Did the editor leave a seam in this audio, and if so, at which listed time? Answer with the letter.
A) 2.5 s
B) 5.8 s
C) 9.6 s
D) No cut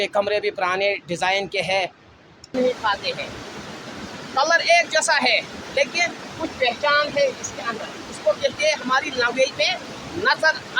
A